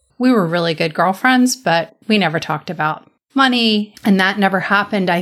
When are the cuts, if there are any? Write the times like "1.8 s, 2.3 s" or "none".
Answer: 3.9 s

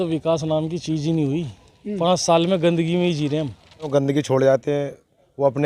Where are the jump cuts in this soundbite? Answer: 3.9 s

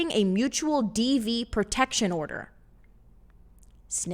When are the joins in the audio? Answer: none

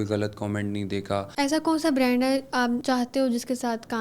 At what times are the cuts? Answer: 1.3 s, 2.8 s

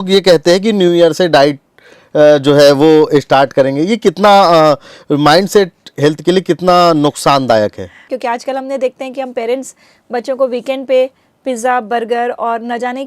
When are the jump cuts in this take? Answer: 8.0 s

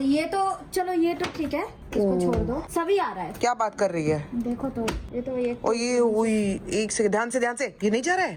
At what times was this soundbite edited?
none

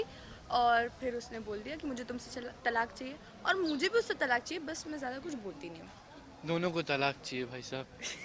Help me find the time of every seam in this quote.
4.7 s

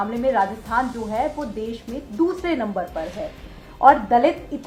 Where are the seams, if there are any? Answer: none

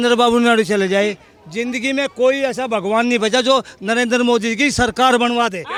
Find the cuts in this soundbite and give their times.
none

